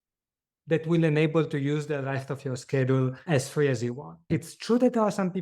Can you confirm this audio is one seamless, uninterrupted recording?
no; 2 cuts; at 3.2 s, 4.3 s

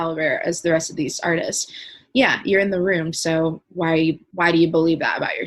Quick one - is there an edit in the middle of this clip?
yes; 1 cut; at 4.3 s

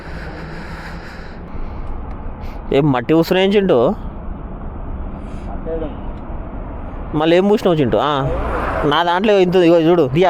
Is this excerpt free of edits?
no; 1 cut; at 1.5 s

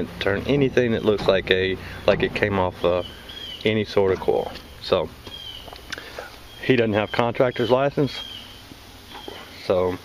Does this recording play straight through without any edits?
no; 1 cut; at 5.9 s

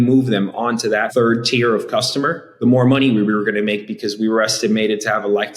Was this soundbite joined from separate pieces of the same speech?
yes; 2 cuts; at 1.1 s, 2.4 s

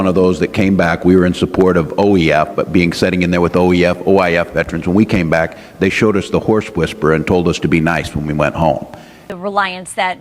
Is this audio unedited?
no; 1 cut; at 9.2 s

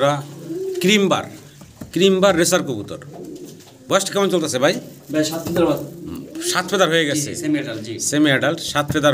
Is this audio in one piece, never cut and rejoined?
yes; 0 cuts

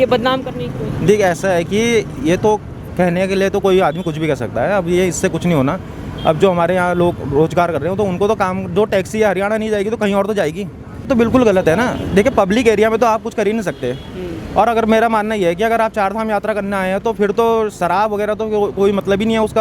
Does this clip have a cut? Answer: yes; 1 cut; at 11.1 s

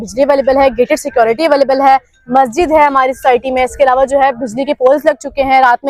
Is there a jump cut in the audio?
no; 0 cuts

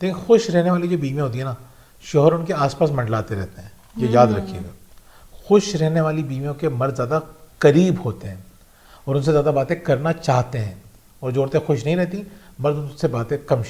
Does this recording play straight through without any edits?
yes; 0 cuts

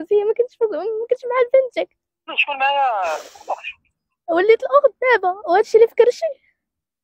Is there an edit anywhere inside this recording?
yes; 1 cut; at 2.4 s

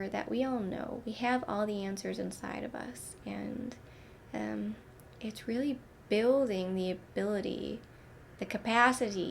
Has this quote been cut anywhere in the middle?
no; 0 cuts

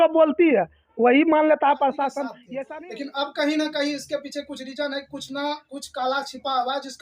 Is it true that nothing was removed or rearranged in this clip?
no; 1 cut; at 2.3 s

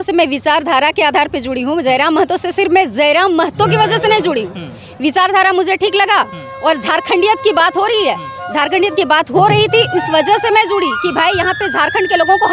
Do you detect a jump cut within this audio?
no; 0 cuts

